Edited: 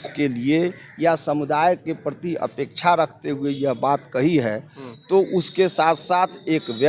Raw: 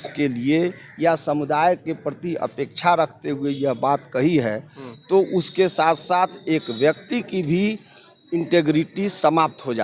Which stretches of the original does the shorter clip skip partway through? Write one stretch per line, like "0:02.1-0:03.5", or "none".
none